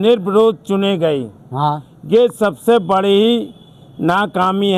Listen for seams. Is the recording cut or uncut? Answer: uncut